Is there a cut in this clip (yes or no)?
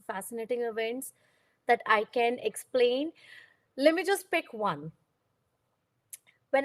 no